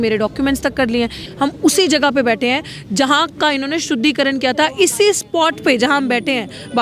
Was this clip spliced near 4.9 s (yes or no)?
no